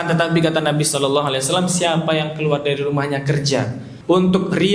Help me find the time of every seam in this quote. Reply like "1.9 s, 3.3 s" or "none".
3.8 s